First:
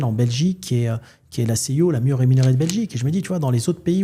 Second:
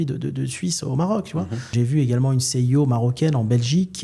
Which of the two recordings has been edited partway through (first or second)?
second